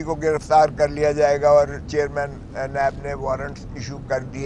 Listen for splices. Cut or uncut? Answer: uncut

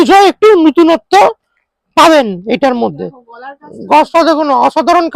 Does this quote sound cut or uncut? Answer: uncut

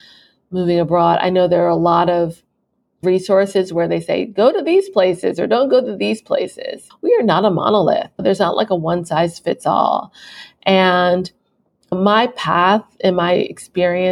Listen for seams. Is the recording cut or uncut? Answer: cut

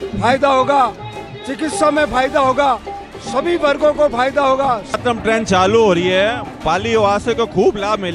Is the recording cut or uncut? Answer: cut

